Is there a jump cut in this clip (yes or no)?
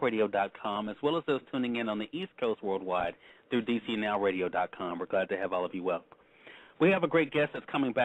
no